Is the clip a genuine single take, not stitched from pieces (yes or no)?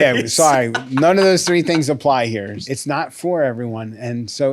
no